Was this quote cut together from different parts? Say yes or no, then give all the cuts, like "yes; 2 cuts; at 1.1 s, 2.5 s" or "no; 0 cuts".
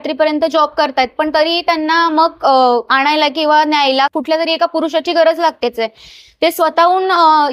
no; 0 cuts